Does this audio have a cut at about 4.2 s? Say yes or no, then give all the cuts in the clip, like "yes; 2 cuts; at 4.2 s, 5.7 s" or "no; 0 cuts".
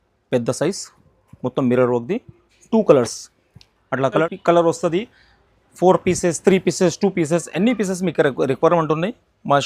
yes; 1 cut; at 4.2 s